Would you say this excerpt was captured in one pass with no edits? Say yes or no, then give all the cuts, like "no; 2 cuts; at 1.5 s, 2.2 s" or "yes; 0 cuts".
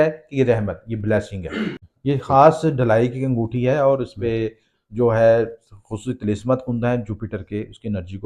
no; 1 cut; at 1.9 s